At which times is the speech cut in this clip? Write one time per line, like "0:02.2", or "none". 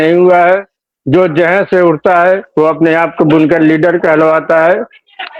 none